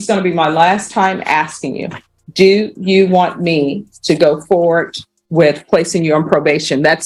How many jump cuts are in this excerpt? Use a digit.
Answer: 0